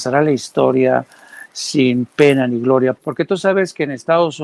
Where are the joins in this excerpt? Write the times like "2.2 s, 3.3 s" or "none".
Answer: 3.0 s

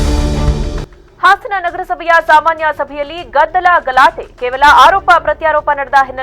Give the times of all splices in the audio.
0.9 s

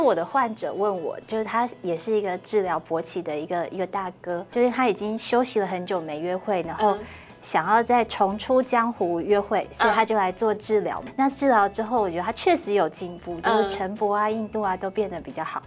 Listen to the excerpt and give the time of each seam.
1.2 s, 4.5 s, 11.1 s

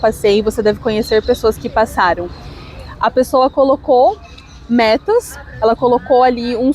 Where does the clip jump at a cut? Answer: none

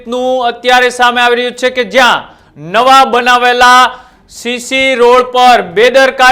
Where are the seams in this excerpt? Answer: none

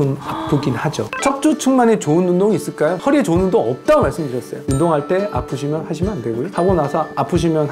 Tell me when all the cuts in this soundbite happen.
1.1 s, 4.6 s

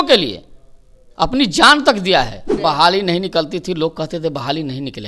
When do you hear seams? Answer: 2.6 s

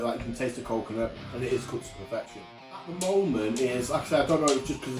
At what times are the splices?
2.9 s

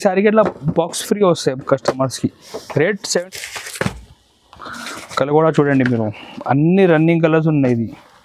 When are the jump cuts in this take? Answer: 3.2 s

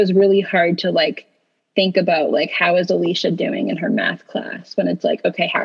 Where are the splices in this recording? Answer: none

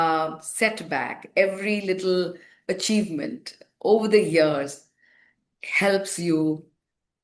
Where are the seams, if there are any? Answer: none

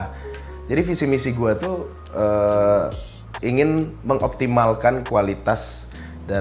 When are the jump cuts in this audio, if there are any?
none

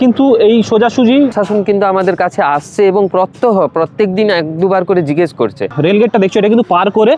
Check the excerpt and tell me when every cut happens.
1.3 s, 5.7 s

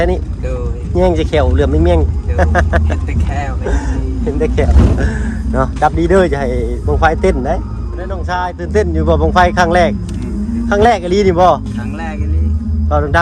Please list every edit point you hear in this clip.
8.2 s

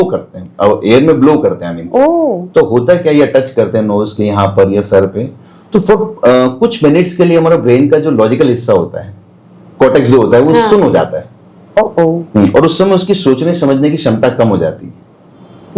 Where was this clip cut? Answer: none

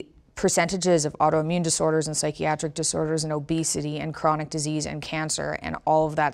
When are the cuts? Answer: none

